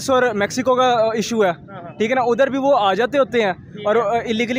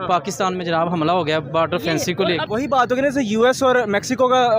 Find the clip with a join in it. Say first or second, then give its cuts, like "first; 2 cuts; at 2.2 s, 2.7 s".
second; 1 cut; at 2.4 s